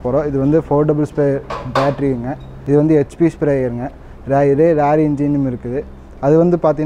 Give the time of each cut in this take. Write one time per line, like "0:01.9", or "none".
0:02.5